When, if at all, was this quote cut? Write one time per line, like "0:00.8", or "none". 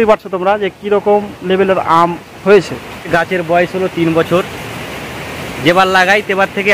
0:03.1